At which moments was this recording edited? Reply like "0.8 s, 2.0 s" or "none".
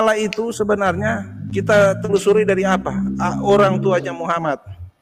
none